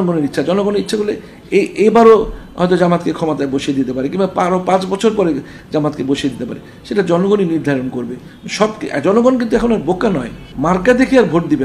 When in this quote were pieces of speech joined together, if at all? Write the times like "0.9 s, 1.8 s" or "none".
10.4 s